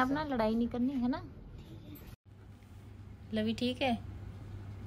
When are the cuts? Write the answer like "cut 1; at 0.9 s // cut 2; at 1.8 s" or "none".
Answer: cut 1; at 2.2 s